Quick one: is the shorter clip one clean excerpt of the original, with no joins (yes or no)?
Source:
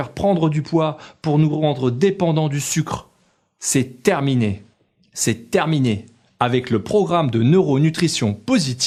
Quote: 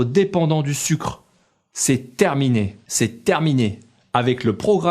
no